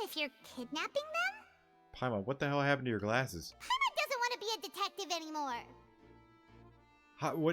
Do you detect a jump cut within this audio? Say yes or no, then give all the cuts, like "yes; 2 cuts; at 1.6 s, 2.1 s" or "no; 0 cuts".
yes; 1 cut; at 3.5 s